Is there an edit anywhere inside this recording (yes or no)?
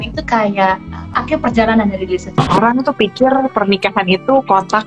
yes